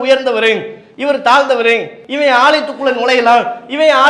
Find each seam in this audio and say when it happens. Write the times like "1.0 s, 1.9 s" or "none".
2.0 s